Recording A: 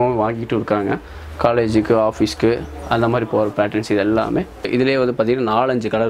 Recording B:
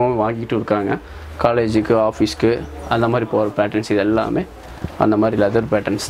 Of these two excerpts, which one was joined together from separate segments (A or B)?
A